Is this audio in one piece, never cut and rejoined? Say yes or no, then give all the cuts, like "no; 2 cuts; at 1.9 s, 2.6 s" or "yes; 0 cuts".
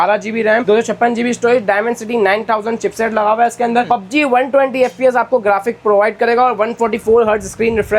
yes; 0 cuts